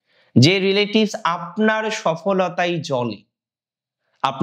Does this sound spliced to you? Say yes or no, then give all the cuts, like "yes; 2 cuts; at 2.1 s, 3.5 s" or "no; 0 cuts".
no; 0 cuts